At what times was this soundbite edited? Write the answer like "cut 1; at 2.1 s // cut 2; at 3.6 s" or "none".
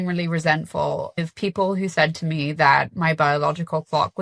cut 1; at 1.2 s